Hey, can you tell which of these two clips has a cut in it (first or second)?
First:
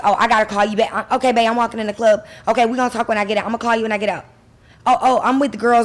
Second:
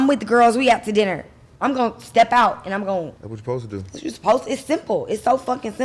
second